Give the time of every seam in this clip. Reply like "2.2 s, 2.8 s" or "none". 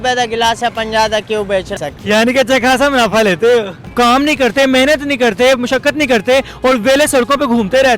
1.7 s, 3.8 s